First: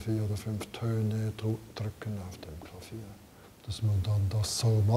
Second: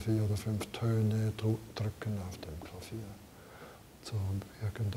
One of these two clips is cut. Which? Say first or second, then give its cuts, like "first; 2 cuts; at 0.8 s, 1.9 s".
first; 1 cut; at 3.4 s